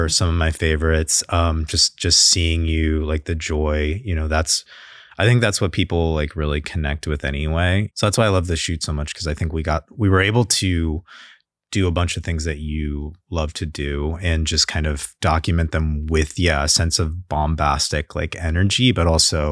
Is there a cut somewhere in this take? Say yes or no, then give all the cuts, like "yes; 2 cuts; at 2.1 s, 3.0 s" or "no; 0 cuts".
yes; 1 cut; at 7.9 s